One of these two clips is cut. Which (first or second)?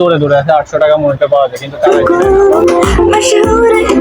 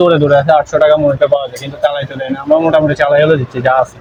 first